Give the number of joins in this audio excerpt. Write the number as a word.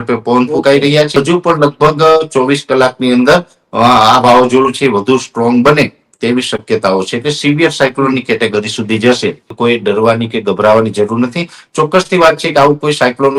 two